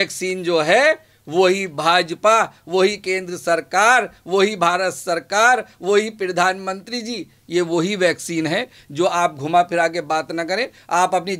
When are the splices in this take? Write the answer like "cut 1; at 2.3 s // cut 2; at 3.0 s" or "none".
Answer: none

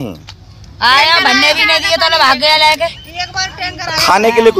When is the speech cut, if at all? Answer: none

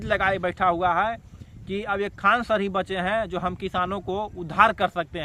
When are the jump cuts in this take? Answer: none

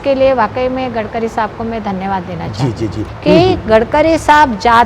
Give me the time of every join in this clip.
cut 1; at 3.1 s

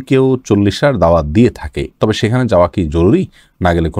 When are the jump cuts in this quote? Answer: none

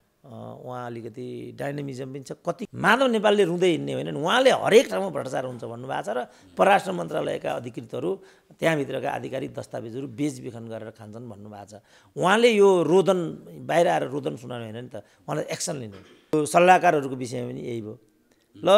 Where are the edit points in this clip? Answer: cut 1; at 2.7 s // cut 2; at 16.3 s

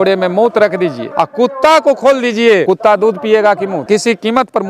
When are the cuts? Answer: cut 1; at 1.0 s // cut 2; at 2.6 s // cut 3; at 3.8 s

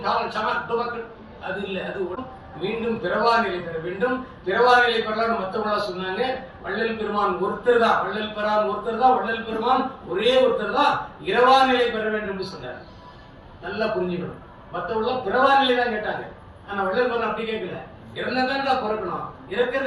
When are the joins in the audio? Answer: cut 1; at 2.2 s

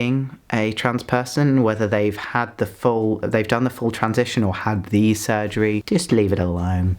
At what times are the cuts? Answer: cut 1; at 5.8 s

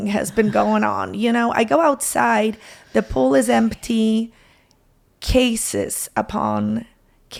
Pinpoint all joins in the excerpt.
none

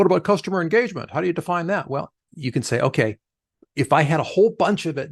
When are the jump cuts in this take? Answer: cut 1; at 2.2 s

